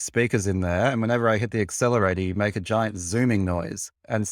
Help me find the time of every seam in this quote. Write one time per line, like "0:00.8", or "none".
none